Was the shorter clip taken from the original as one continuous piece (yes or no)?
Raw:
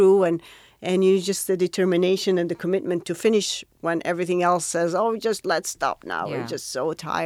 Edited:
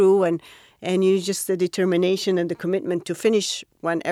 yes